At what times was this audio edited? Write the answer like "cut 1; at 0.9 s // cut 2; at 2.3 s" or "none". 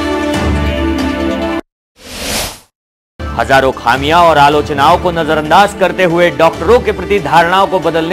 cut 1; at 1.6 s // cut 2; at 3.3 s